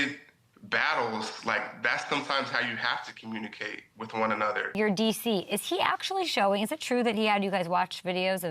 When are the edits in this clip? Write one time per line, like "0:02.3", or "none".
0:04.7